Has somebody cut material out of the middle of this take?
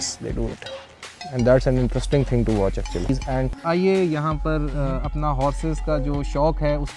yes; 1 cut; at 3.3 s

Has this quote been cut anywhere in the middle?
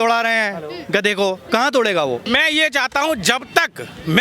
yes; 1 cut; at 2.3 s

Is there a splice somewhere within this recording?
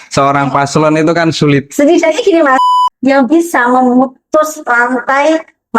yes; 1 cut; at 2.7 s

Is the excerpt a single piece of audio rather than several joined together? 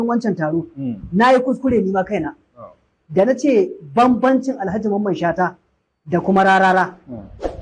yes; 0 cuts

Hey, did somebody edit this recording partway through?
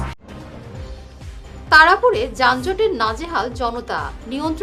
no; 0 cuts

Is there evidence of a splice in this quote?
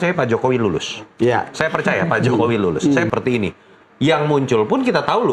yes; 1 cut; at 3.1 s

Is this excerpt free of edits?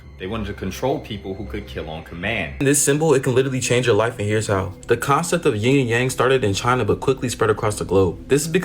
no; 1 cut; at 2.6 s

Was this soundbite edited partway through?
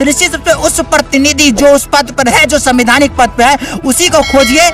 no; 0 cuts

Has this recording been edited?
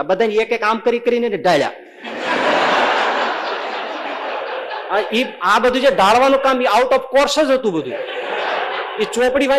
no; 0 cuts

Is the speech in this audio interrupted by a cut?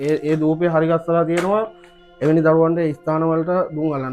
no; 0 cuts

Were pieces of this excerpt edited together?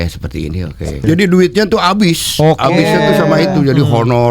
yes; 1 cut; at 1.0 s

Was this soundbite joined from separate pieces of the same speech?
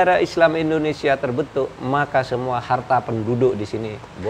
no; 0 cuts

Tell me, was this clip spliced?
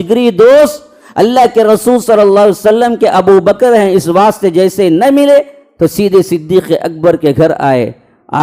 no; 0 cuts

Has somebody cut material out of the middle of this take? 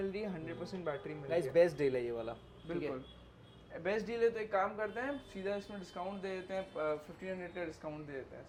no; 0 cuts

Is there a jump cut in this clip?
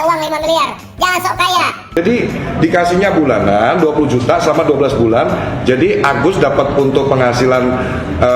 yes; 1 cut; at 2.0 s

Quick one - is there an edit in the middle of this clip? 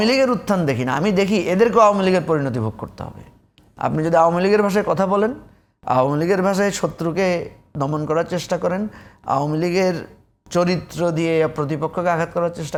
no; 0 cuts

